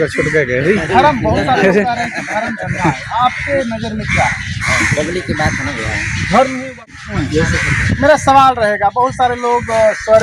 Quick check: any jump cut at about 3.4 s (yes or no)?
no